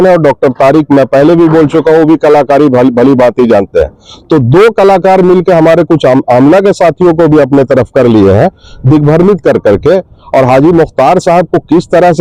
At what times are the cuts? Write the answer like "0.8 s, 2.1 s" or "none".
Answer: none